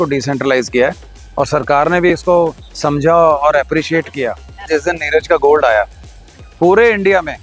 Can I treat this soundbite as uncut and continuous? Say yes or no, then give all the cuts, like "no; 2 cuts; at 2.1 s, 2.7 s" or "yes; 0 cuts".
no; 1 cut; at 4.7 s